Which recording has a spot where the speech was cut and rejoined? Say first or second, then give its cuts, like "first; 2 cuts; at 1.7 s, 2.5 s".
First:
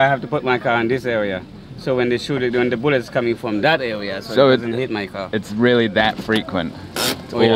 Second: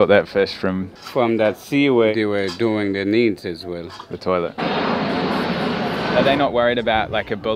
second; 4 cuts; at 1.0 s, 2.1 s, 4.8 s, 6.1 s